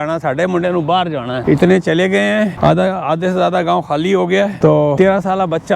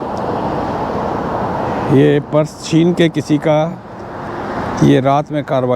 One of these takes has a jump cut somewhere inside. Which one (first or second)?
first